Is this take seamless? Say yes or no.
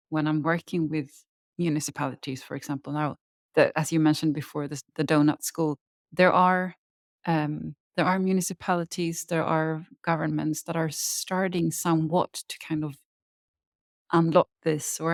yes